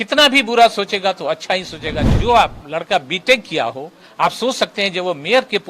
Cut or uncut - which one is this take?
cut